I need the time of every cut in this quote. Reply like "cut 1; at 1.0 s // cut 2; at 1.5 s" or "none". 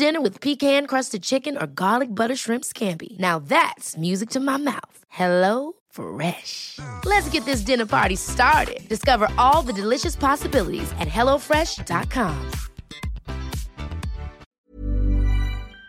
cut 1; at 14.5 s